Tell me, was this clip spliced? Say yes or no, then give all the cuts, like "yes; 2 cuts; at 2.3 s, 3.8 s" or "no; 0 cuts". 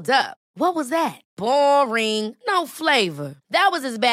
no; 0 cuts